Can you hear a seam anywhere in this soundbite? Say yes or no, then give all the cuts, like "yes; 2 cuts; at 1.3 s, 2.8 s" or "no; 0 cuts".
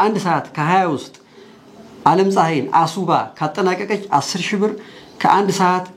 no; 0 cuts